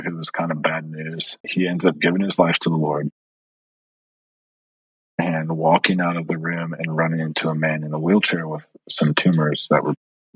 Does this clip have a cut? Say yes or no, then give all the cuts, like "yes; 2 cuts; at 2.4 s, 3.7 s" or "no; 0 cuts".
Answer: yes; 1 cut; at 1.4 s